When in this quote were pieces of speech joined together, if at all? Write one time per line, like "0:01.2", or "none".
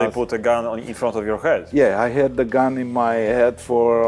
none